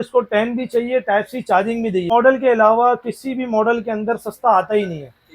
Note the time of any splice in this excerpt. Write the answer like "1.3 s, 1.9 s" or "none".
2.1 s